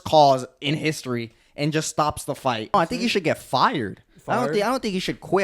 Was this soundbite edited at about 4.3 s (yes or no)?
no